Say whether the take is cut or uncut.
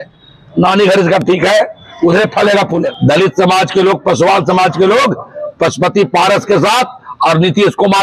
cut